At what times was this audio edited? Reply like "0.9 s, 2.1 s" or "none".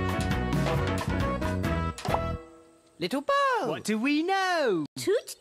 0.9 s